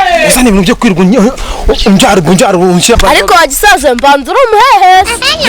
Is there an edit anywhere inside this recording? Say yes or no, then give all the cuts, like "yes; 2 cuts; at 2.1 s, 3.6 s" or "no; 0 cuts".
yes; 1 cut; at 3.0 s